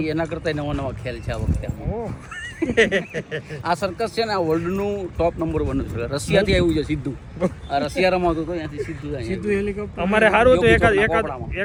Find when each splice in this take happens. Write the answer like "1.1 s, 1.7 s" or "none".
none